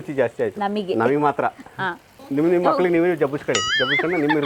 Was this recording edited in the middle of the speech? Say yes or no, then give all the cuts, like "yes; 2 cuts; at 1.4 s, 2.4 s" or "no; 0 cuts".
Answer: no; 0 cuts